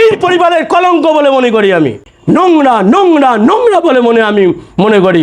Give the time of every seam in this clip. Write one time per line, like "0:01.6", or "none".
0:02.1